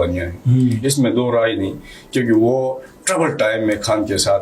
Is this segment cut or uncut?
uncut